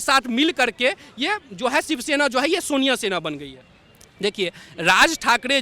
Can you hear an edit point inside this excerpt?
no; 0 cuts

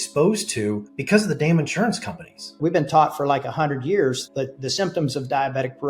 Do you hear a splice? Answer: yes; 3 cuts; at 0.9 s, 2.5 s, 4.2 s

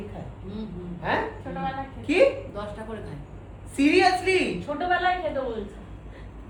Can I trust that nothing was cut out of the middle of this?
yes; 0 cuts

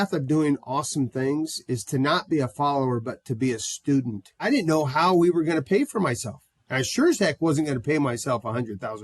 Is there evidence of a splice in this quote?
yes; 1 cut; at 4.5 s

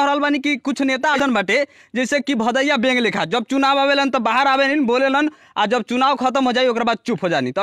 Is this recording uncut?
no; 1 cut; at 1.1 s

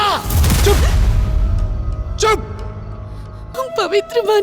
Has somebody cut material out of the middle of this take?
yes; 1 cut; at 3.4 s

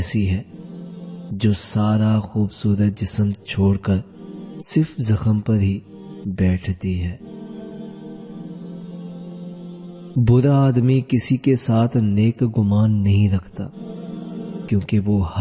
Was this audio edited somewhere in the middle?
yes; 2 cuts; at 7.2 s, 9.5 s

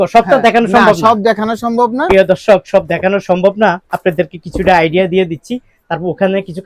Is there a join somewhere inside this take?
no; 0 cuts

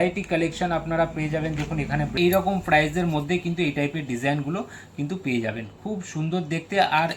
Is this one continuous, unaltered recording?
no; 1 cut; at 2.1 s

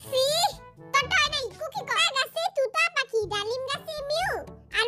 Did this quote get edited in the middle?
yes; 1 cut; at 2.0 s

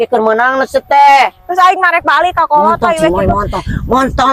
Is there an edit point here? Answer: no; 0 cuts

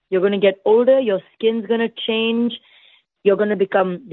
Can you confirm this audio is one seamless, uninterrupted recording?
yes; 0 cuts

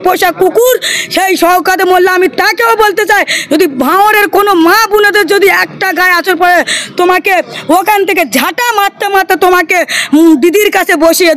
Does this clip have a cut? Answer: no; 0 cuts

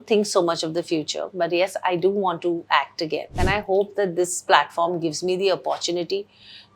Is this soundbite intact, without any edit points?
no; 1 cut; at 3.4 s

